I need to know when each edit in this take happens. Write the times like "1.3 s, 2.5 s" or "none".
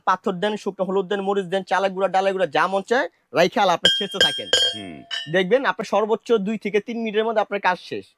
none

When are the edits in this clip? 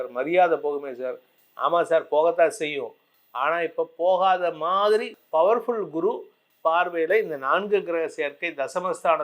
5.2 s

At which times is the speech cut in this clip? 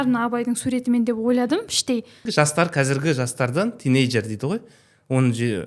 2.2 s

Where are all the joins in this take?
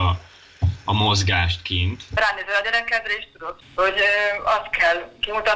2.1 s, 3.6 s

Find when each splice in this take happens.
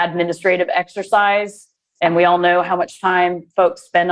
none

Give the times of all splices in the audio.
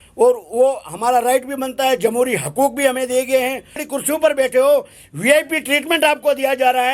3.9 s

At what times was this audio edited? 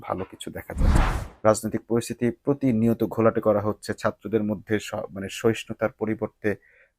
1.0 s

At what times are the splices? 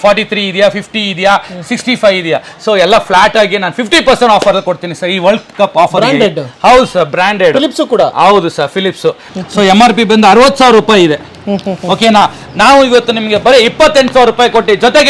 9.3 s

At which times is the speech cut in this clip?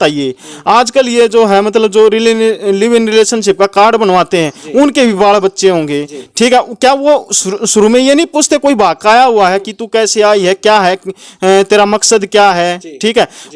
none

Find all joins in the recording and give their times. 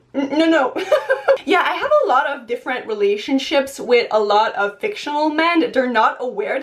1.4 s

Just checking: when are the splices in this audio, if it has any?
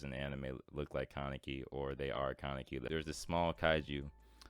2.8 s

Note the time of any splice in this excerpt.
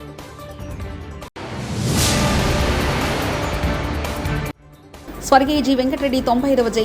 1.3 s

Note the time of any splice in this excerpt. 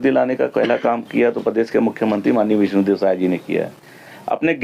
none

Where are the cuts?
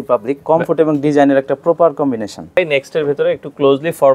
2.6 s

